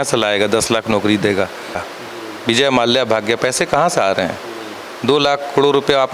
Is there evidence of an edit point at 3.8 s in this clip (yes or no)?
no